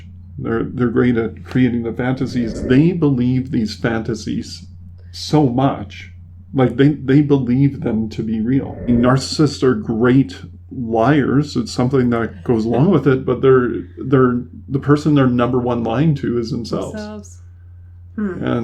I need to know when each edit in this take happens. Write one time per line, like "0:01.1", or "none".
0:02.6
0:08.8

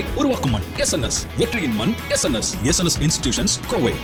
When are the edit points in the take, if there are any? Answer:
none

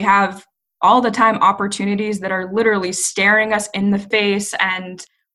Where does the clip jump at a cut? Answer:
0:04.1

